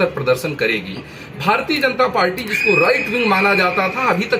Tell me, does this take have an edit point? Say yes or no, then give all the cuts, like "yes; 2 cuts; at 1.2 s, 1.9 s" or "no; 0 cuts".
no; 0 cuts